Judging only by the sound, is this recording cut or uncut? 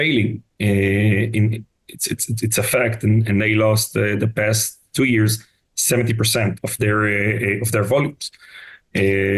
uncut